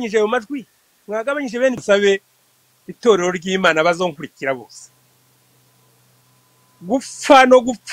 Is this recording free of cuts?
no; 1 cut; at 1.8 s

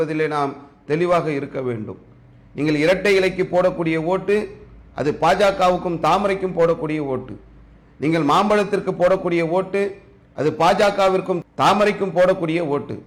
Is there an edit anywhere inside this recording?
no; 0 cuts

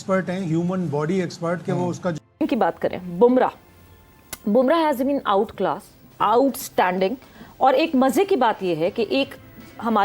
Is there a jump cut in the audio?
yes; 1 cut; at 2.2 s

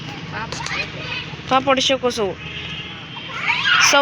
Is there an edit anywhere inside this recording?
no; 0 cuts

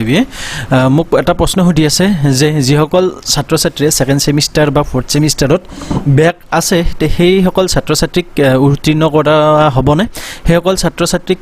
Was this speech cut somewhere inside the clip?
no; 0 cuts

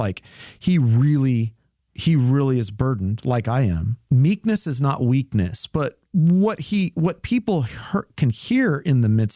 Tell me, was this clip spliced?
yes; 1 cut; at 3.9 s

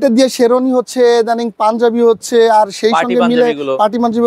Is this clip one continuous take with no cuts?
yes; 0 cuts

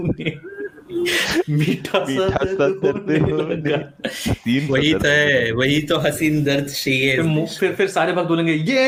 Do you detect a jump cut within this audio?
no; 0 cuts

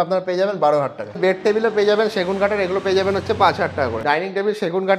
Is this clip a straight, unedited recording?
no; 2 cuts; at 1.2 s, 4.0 s

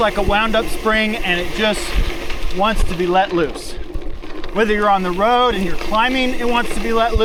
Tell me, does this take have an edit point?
no; 0 cuts

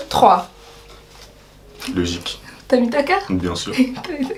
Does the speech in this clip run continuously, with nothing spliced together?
yes; 0 cuts

